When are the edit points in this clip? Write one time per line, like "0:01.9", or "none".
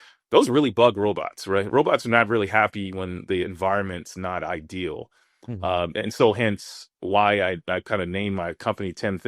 0:06.9